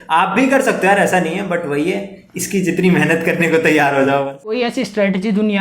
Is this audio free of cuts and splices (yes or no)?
no